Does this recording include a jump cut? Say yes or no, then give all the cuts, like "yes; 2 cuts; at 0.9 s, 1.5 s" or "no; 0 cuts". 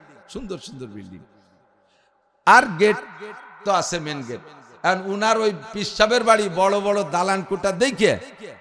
no; 0 cuts